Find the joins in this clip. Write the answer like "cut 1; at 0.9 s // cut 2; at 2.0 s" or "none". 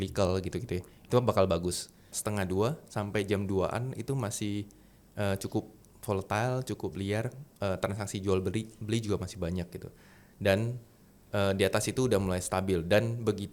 cut 1; at 2.2 s